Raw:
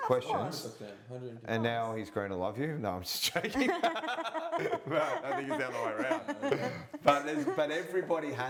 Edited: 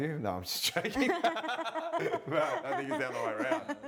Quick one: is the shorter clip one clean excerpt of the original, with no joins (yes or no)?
yes